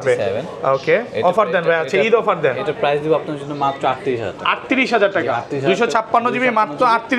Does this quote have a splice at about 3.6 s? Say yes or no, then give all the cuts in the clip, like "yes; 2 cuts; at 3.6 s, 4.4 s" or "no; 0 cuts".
no; 0 cuts